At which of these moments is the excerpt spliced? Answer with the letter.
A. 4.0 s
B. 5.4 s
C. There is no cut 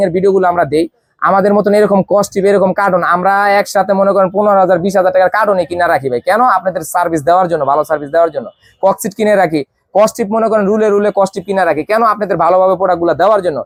C